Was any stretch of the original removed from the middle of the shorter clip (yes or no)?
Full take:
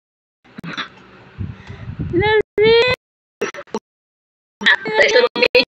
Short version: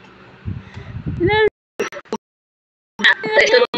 yes